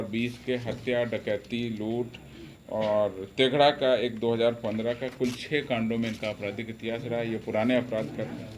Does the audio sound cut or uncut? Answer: uncut